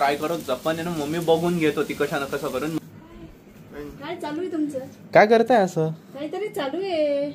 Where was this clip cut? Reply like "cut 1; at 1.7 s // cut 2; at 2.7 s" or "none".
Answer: cut 1; at 2.8 s